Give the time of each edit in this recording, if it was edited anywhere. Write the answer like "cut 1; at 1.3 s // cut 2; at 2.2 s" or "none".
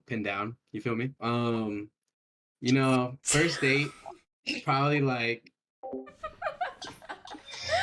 cut 1; at 1.2 s